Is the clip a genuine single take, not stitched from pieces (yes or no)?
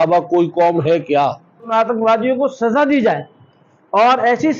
no